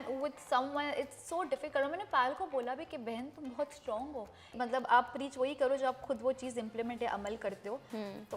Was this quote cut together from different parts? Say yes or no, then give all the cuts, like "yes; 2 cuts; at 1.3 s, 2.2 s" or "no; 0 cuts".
yes; 1 cut; at 4.5 s